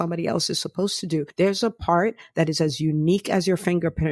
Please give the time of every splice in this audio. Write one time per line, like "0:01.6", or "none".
0:01.3